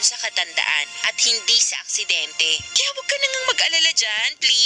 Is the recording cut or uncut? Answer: cut